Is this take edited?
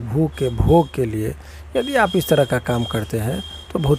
no; 0 cuts

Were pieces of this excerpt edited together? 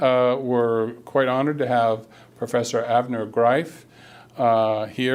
no; 0 cuts

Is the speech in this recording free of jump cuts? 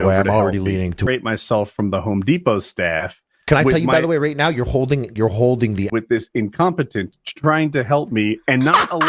no; 2 cuts; at 1.1 s, 5.9 s

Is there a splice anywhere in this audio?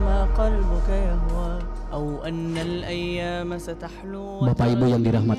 no; 0 cuts

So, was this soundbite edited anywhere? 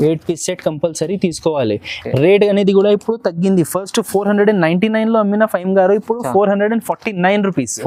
no; 0 cuts

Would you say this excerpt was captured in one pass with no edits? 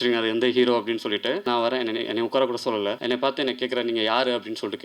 no; 2 cuts; at 1.4 s, 3.0 s

